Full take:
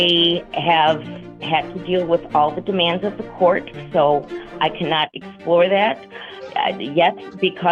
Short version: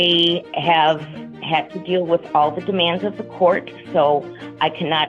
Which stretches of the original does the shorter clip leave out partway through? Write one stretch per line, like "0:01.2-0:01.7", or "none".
none